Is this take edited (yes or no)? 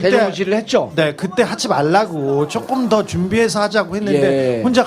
yes